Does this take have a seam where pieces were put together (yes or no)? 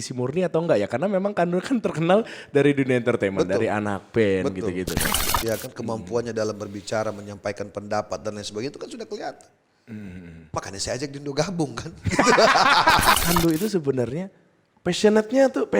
yes